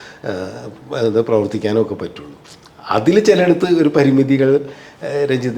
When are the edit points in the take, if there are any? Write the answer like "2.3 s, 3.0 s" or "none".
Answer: none